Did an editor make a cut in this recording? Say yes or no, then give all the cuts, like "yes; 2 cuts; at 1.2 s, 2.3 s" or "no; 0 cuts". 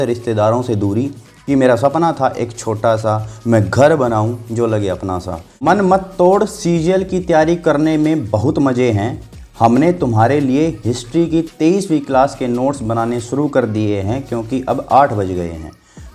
yes; 1 cut; at 5.6 s